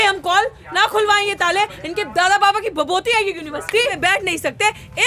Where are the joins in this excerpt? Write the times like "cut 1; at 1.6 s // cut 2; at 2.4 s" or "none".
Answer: cut 1; at 4.0 s